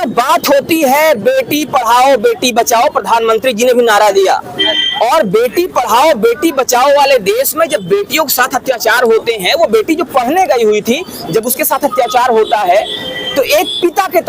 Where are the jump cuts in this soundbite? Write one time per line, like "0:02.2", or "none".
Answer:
none